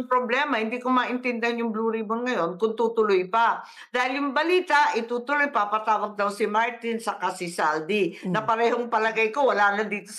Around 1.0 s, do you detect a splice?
no; 0 cuts

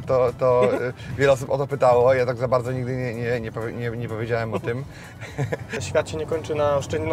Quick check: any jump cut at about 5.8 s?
yes; 1 cut; at 5.8 s

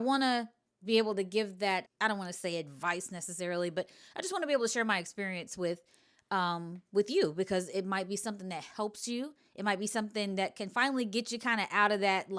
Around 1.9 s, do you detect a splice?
yes; 1 cut; at 1.9 s

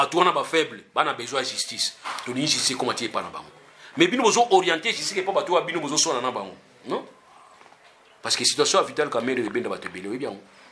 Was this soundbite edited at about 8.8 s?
no; 0 cuts

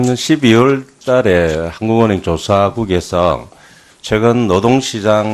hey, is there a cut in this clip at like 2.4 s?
yes; 1 cut; at 2.4 s

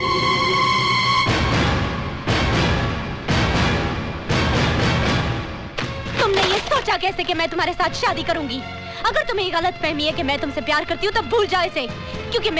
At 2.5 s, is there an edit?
no; 0 cuts

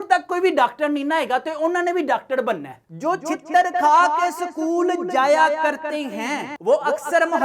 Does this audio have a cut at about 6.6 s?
yes; 2 cuts; at 2.9 s, 6.6 s

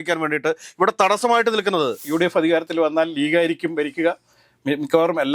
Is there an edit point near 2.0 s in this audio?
yes; 1 cut; at 2.0 s

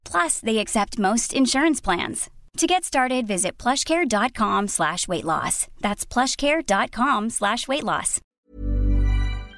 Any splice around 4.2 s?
no; 1 cut; at 8.2 s

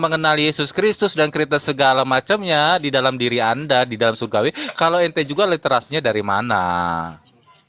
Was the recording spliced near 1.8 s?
no; 0 cuts

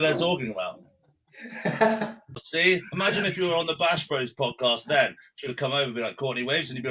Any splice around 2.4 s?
yes; 1 cut; at 2.4 s

